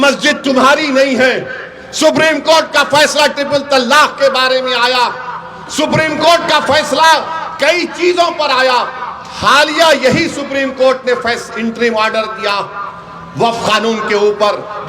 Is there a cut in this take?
no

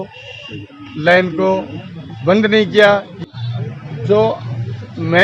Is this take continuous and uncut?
no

